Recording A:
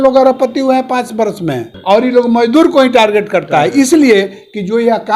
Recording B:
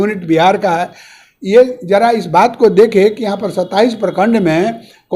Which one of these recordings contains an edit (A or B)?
A